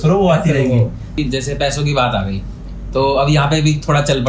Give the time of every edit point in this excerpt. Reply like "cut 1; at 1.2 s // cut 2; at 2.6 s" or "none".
cut 1; at 1.2 s